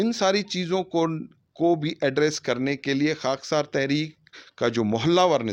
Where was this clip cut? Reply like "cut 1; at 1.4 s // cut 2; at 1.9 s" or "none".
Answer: none